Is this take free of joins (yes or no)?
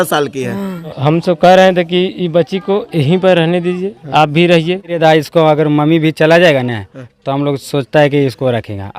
no